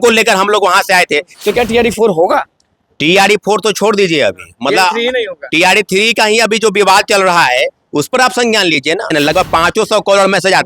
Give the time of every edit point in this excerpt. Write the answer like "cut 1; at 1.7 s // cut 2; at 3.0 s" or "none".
cut 1; at 1.3 s // cut 2; at 9.1 s

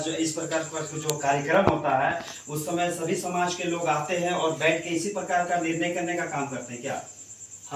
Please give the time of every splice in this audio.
none

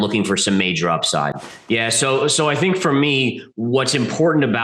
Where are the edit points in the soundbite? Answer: cut 1; at 1.5 s

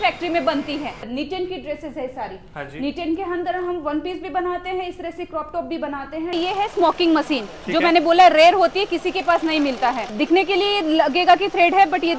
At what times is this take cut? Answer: cut 1; at 1.0 s // cut 2; at 6.3 s // cut 3; at 10.1 s

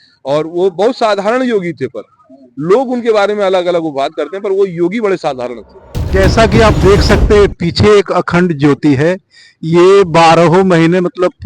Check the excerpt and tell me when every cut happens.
cut 1; at 6.0 s

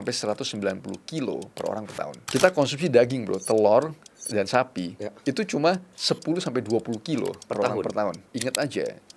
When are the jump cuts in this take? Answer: cut 1; at 2.2 s // cut 2; at 8.3 s

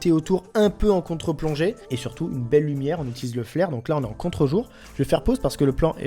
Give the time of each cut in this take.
cut 1; at 1.9 s

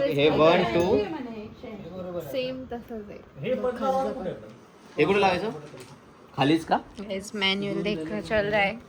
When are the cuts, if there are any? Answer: none

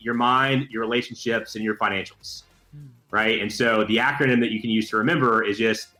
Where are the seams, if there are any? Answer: none

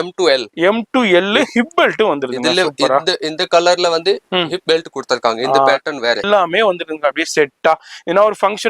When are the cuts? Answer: cut 1; at 6.2 s

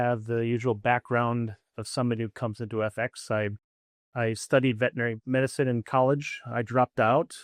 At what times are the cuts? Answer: none

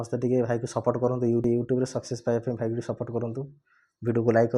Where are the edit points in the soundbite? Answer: cut 1; at 1.5 s

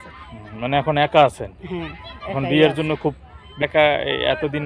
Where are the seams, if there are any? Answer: cut 1; at 3.6 s

